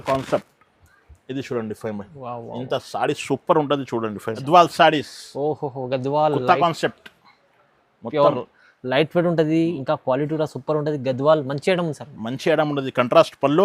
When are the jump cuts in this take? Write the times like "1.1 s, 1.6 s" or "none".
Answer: 4.4 s